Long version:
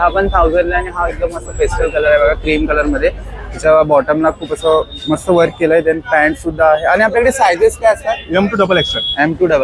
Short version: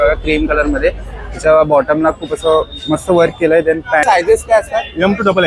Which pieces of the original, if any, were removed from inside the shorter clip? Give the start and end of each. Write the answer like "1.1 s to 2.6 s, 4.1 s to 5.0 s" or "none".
6.2 s to 7.4 s